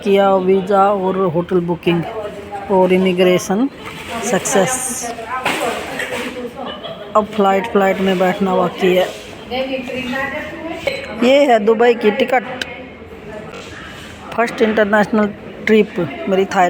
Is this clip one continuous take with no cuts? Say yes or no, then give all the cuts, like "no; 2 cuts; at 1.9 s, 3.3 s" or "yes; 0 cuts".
no; 1 cut; at 13.9 s